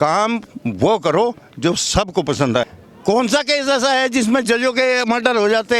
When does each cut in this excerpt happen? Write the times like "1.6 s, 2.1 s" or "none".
2.7 s